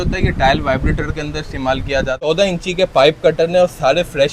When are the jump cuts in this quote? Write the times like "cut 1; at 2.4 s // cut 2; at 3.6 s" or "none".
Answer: cut 1; at 2.3 s